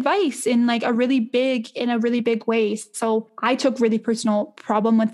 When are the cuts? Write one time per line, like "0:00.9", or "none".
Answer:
0:03.3